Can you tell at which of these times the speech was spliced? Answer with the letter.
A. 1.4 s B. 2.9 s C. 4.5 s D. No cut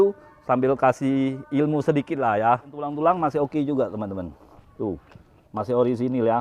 B